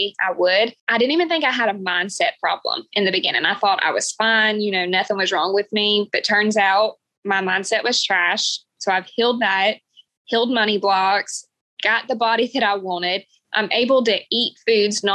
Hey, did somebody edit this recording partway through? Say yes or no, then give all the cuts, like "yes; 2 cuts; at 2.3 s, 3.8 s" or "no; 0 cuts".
no; 0 cuts